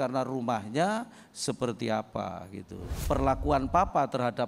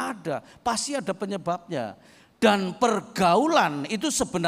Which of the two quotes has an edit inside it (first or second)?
first